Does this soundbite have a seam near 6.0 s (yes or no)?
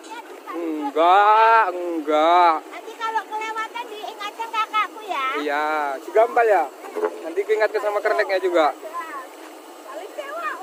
no